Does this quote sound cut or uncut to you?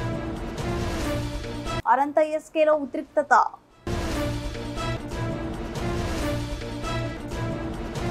cut